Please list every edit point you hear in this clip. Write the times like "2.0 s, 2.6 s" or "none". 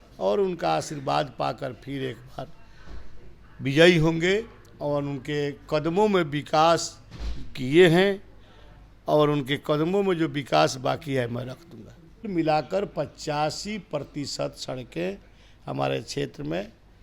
12.3 s